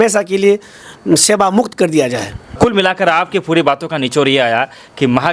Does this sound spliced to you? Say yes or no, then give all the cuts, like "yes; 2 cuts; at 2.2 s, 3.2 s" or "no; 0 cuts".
yes; 1 cut; at 2.5 s